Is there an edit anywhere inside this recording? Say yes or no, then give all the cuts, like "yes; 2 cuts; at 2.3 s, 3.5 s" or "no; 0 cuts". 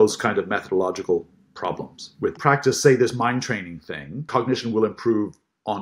yes; 2 cuts; at 2.4 s, 4.3 s